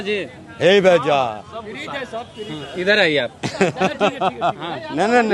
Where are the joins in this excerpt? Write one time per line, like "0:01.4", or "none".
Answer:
none